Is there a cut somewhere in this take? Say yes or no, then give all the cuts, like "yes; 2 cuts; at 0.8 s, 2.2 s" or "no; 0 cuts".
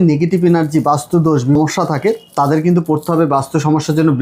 yes; 1 cut; at 1.6 s